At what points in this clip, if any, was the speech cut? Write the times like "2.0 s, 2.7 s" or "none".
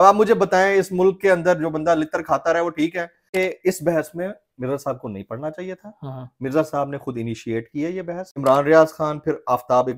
3.3 s, 8.2 s